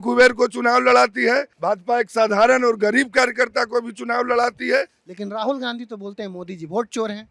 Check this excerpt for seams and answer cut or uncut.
cut